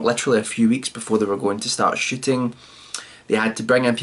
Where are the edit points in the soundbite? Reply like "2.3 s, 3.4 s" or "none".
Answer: none